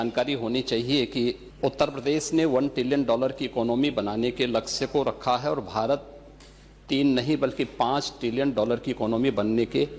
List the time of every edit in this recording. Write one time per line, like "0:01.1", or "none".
0:01.5